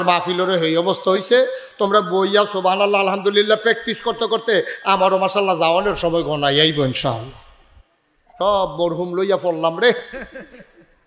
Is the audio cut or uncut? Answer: cut